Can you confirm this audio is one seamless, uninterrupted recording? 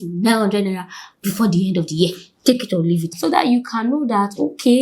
no; 1 cut; at 3.2 s

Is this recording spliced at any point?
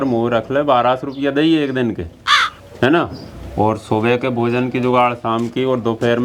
no; 0 cuts

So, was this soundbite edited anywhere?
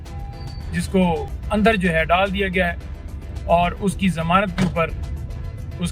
yes; 1 cut; at 1.4 s

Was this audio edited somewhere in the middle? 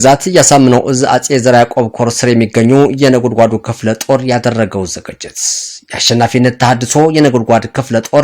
no; 0 cuts

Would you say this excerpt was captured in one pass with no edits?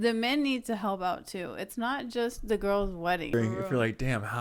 no; 1 cut; at 3.3 s

